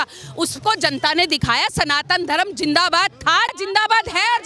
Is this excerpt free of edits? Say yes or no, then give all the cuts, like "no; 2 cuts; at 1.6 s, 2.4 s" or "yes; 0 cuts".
no; 1 cut; at 3.5 s